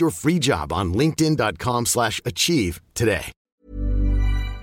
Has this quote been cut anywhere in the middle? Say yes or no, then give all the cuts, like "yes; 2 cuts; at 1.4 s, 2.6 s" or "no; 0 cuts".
yes; 1 cut; at 3.4 s